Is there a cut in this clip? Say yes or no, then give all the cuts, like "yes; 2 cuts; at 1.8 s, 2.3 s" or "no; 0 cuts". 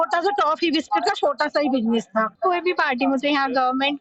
yes; 1 cut; at 2.3 s